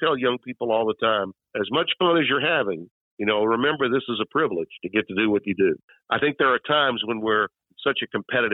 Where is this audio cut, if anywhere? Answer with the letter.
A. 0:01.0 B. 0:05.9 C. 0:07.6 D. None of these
C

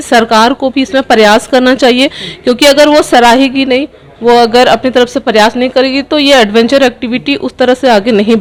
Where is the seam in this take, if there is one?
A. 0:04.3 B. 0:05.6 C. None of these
C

